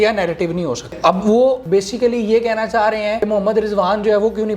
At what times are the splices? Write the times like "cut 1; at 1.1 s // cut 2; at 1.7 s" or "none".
cut 1; at 0.9 s // cut 2; at 1.6 s // cut 3; at 3.3 s